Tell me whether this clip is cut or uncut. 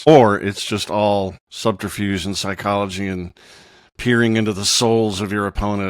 cut